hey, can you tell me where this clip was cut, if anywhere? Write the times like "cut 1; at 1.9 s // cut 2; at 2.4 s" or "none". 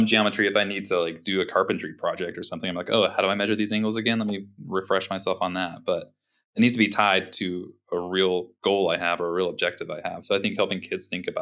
none